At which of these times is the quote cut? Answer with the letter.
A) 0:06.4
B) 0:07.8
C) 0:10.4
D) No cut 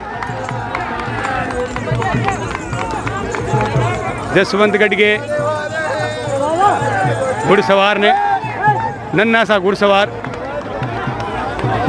D